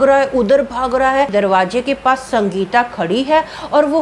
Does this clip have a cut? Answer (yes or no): yes